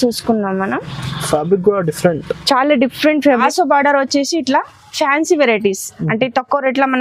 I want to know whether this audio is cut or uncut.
cut